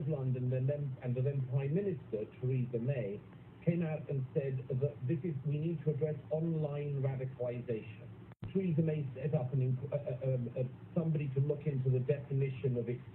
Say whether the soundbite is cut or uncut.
cut